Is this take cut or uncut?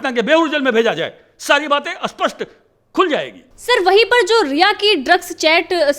uncut